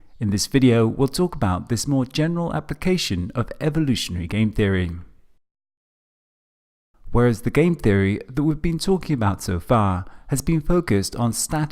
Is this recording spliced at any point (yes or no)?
yes